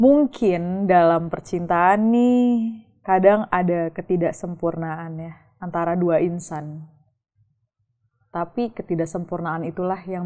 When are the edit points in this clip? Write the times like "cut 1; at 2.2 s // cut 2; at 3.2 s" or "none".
none